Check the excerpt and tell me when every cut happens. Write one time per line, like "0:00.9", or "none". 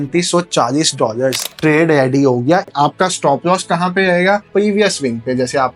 0:01.5
0:02.7
0:04.5